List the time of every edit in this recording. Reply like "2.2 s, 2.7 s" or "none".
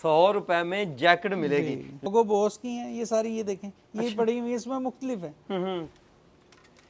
2.1 s